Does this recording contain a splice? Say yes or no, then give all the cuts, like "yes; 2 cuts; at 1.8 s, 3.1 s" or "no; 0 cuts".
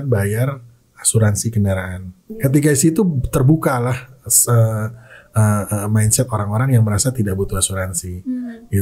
yes; 1 cut; at 2.2 s